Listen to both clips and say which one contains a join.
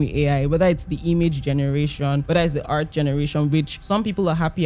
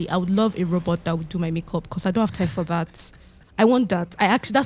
first; 2 cuts; at 2.2 s, 3.8 s

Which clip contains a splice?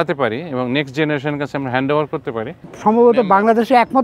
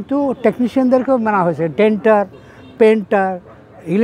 first; 1 cut; at 2.6 s

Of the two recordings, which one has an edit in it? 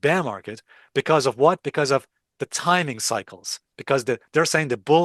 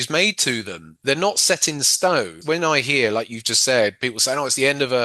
second; 1 cut; at 2.3 s

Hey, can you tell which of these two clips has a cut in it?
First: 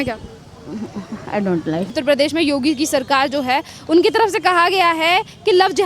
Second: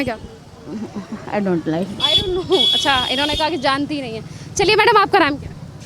first; 1 cut; at 2.0 s

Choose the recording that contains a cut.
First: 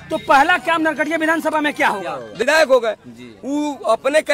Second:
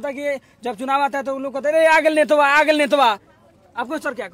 first; 1 cut; at 2.4 s

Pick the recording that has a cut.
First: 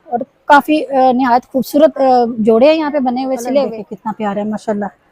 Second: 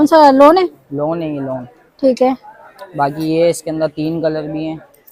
first; 1 cut; at 3.9 s

